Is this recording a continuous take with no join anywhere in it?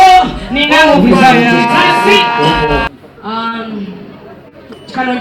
no; 1 cut; at 2.9 s

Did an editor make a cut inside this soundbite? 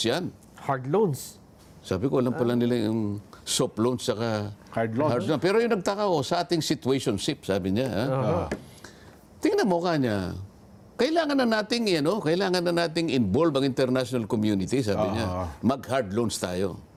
no; 0 cuts

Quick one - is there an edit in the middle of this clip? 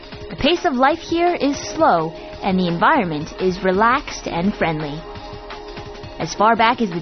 no; 0 cuts

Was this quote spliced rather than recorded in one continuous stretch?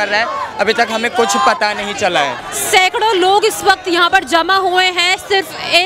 yes; 1 cut; at 2.5 s

